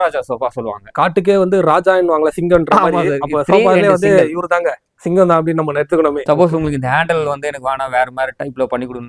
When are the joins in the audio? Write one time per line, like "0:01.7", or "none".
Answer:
0:00.9
0:06.2